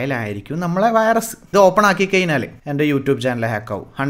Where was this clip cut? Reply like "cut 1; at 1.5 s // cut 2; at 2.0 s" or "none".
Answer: cut 1; at 1.4 s // cut 2; at 2.6 s